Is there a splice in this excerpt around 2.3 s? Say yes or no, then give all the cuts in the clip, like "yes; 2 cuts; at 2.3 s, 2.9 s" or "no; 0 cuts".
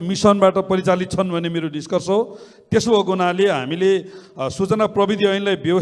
no; 0 cuts